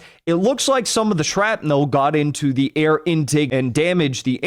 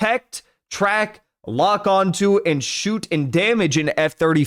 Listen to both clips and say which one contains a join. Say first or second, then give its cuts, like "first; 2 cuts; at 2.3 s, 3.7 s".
first; 1 cut; at 3.5 s